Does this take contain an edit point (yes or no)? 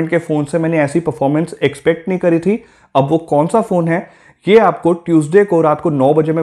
no